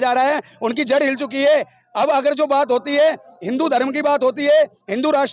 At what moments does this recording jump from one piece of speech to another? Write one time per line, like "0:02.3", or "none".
none